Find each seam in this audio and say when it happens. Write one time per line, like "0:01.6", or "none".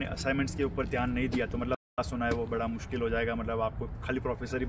0:02.0

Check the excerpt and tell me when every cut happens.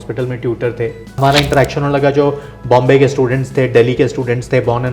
0:01.0

